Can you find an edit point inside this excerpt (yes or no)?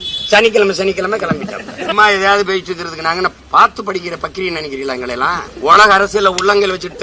yes